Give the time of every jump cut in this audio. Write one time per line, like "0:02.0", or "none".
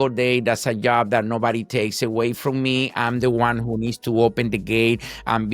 none